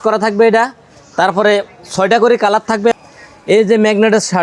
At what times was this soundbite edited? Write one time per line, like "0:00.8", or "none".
0:02.7